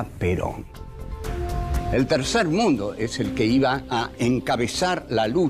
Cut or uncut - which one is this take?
cut